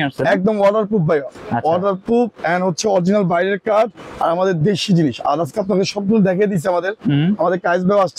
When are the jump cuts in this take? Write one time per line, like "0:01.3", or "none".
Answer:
none